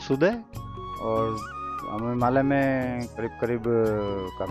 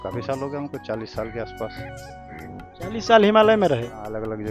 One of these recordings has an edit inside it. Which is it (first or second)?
first